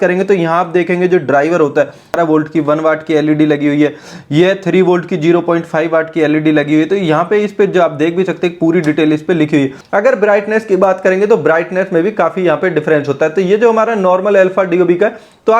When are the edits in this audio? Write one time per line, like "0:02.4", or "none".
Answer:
0:02.1
0:09.8